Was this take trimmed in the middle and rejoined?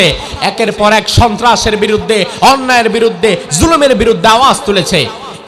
no; 0 cuts

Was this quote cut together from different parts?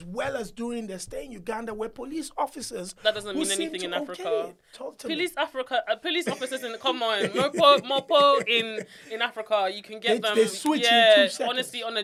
no; 0 cuts

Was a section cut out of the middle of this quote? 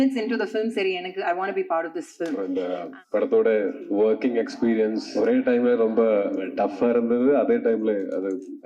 yes; 4 cuts; at 2.4 s, 3.8 s, 5.0 s, 6.4 s

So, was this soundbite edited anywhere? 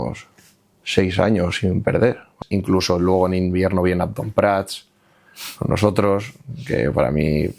yes; 1 cut; at 2.3 s

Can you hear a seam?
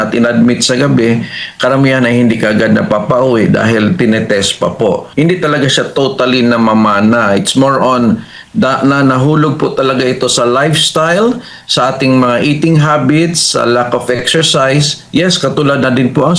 yes; 1 cut; at 5.1 s

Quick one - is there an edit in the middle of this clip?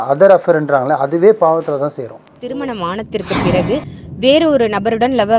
yes; 1 cut; at 2.4 s

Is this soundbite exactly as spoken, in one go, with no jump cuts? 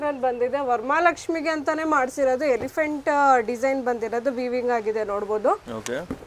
yes; 0 cuts

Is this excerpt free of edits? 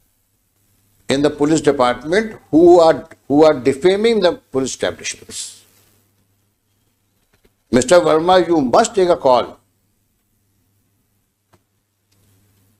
yes; 0 cuts

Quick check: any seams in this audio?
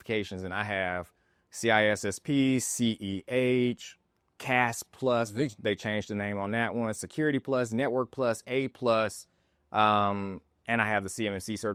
no; 0 cuts

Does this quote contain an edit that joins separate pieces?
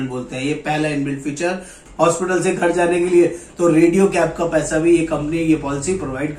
yes; 1 cut; at 1.8 s

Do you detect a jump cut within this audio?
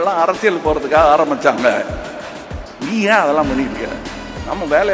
no; 0 cuts

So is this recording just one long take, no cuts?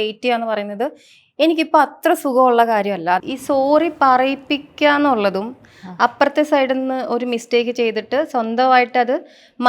no; 1 cut; at 3.3 s

